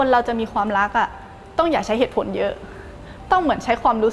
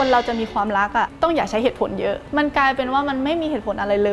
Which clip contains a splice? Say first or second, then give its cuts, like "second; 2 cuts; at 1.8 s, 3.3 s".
second; 2 cuts; at 1.1 s, 2.2 s